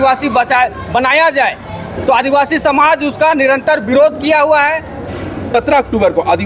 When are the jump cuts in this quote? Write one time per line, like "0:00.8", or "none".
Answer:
0:05.5